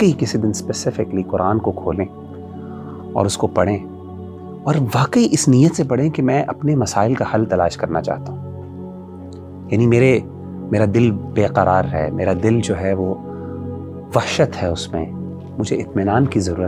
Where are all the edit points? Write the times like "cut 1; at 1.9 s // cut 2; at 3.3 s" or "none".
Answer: none